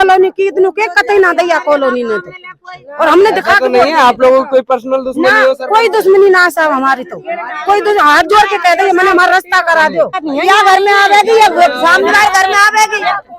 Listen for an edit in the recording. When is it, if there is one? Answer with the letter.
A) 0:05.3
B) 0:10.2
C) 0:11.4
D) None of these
B